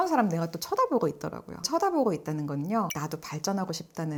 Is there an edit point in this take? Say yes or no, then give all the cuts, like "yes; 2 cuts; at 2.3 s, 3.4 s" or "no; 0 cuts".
no; 0 cuts